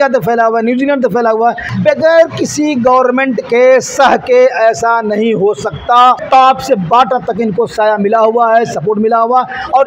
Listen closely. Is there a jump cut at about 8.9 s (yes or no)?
no